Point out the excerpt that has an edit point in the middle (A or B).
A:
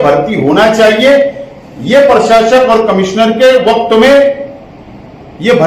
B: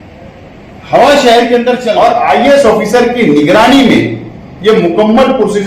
B